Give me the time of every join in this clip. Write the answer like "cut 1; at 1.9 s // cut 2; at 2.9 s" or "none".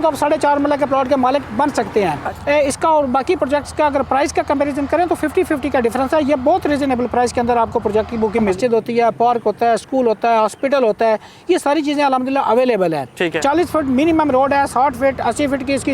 cut 1; at 2.2 s // cut 2; at 8.6 s // cut 3; at 13.6 s